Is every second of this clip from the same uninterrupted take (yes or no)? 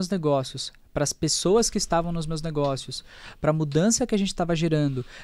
yes